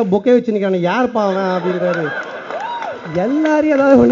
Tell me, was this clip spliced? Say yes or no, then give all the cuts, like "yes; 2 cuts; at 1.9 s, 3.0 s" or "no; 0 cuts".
no; 0 cuts